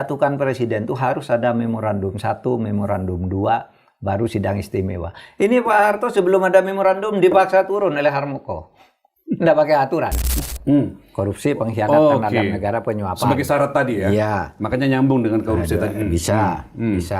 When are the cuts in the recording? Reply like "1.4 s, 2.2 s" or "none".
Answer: 10.4 s